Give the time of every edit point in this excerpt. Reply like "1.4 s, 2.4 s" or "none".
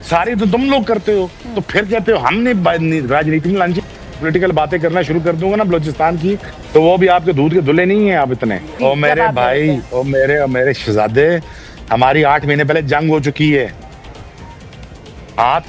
3.8 s, 8.7 s

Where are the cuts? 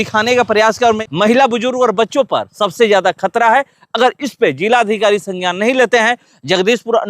1.0 s

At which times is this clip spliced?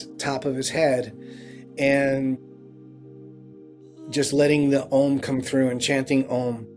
none

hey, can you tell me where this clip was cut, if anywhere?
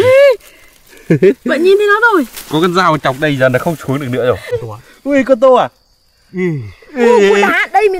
4.4 s

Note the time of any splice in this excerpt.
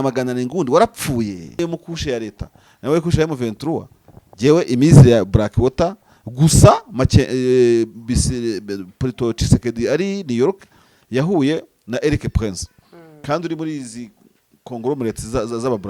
1.6 s

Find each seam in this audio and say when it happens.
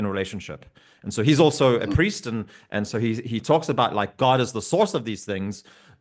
none

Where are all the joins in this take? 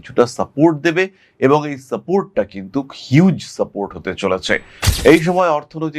4.8 s

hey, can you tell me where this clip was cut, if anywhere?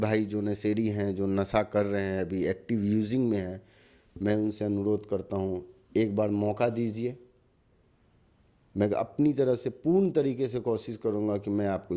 none

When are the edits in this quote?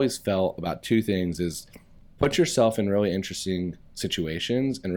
none

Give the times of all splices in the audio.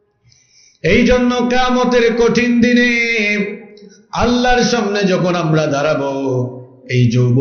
none

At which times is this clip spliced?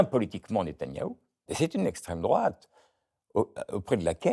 1.5 s

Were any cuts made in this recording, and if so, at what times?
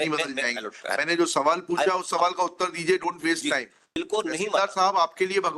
3.9 s

